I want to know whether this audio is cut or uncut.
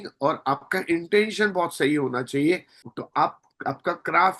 cut